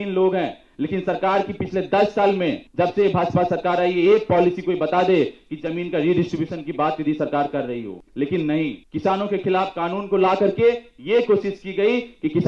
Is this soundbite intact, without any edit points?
no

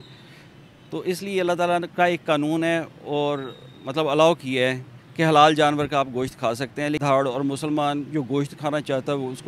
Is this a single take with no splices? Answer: no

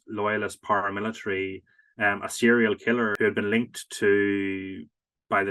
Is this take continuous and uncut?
no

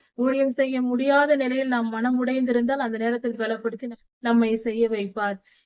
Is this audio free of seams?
yes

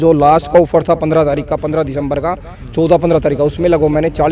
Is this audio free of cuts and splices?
yes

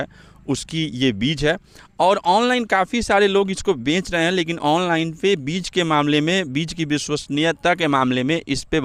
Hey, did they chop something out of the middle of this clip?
no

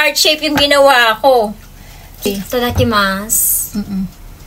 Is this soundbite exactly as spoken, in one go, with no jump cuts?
no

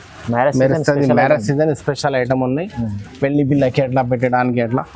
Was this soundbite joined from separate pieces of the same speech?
no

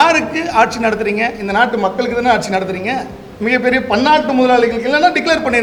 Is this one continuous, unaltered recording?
yes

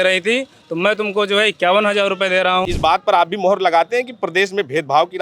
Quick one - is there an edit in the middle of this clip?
yes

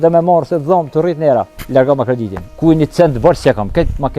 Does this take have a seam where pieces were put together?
yes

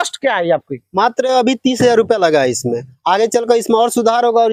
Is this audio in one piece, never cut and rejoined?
yes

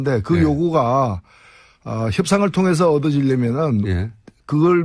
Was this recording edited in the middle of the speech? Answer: no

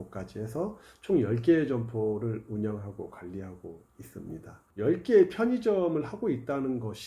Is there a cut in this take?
yes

